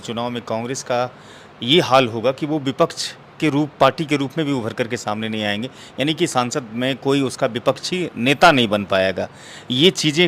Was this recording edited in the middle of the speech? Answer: no; 0 cuts

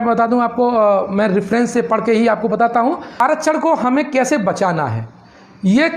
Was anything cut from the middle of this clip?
yes; 1 cut; at 3.2 s

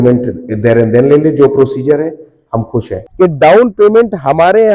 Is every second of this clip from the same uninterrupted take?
no; 1 cut; at 3.0 s

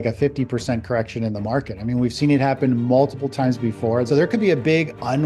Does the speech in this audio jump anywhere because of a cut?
yes; 1 cut; at 4.1 s

